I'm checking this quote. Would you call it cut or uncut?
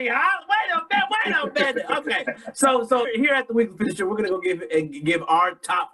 cut